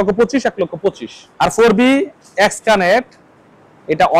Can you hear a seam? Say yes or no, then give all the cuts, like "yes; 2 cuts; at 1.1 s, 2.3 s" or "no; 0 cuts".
yes; 1 cut; at 1.3 s